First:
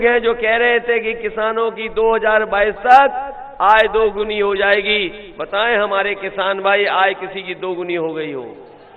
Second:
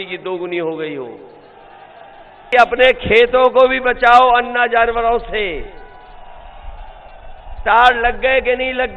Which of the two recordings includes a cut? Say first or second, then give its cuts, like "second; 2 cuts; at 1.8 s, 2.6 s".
second; 1 cut; at 2.5 s